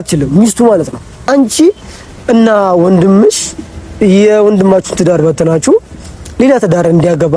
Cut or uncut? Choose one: cut